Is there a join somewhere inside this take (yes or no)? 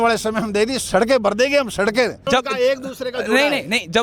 yes